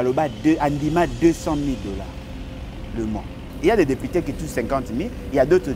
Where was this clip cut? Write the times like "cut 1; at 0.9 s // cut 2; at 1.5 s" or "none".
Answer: cut 1; at 3.5 s